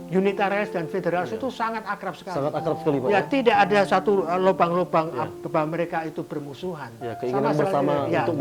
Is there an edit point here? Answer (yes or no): no